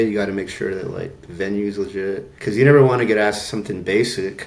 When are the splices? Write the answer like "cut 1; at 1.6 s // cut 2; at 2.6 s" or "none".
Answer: cut 1; at 2.3 s